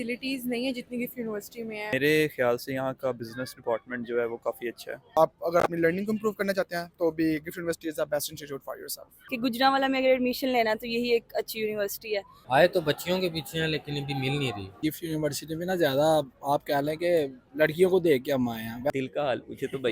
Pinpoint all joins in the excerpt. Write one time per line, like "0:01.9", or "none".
0:01.9
0:05.1
0:09.1
0:12.3
0:14.8
0:18.9